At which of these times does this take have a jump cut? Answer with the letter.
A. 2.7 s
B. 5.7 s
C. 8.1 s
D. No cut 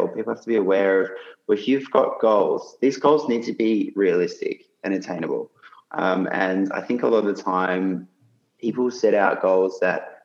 D